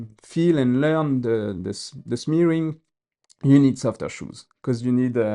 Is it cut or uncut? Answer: uncut